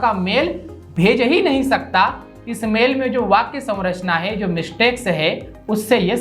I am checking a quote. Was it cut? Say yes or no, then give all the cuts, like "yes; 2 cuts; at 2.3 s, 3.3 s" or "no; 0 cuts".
no; 0 cuts